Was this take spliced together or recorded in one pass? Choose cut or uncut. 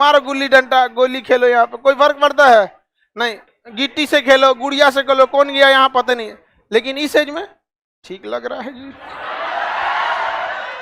cut